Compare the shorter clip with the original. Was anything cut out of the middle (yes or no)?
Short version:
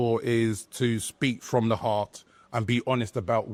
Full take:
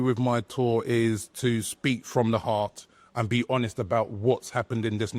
no